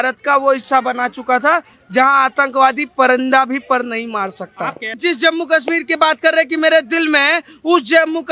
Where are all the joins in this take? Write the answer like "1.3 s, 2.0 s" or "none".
5.0 s